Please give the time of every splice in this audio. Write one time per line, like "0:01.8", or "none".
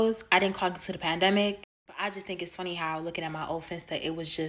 none